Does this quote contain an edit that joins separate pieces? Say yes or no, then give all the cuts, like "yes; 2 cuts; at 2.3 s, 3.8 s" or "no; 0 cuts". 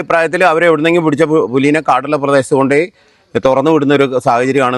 no; 0 cuts